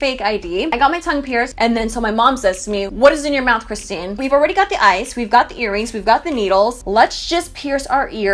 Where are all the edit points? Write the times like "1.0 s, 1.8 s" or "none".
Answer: 1.5 s, 2.9 s, 4.2 s